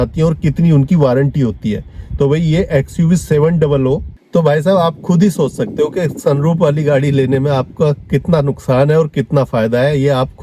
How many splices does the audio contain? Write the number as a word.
one